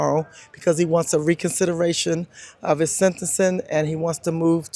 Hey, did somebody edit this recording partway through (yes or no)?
no